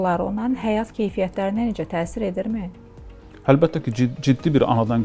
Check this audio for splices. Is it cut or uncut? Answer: uncut